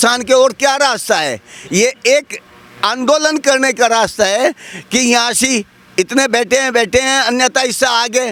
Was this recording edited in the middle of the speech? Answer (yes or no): no